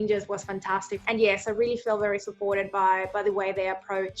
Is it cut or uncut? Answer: cut